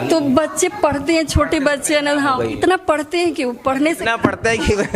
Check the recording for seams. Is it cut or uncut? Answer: uncut